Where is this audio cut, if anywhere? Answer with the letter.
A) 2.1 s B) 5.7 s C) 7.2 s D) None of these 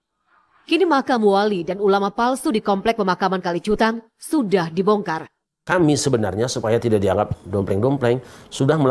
B